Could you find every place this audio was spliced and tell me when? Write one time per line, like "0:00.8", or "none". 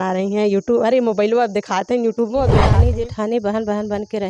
0:02.7

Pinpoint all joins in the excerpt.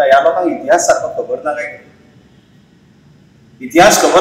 none

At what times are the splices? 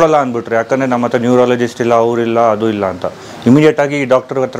none

